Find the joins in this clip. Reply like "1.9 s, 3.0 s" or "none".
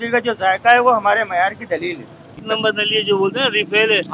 2.4 s